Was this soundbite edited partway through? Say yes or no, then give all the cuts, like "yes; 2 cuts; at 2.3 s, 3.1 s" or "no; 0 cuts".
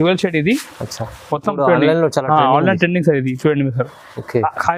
no; 0 cuts